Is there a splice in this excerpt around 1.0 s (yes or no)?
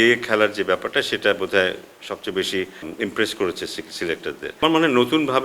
no